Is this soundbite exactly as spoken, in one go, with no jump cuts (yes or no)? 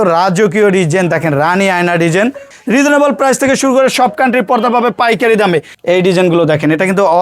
no